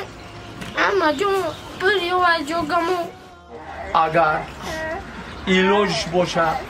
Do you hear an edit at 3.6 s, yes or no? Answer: yes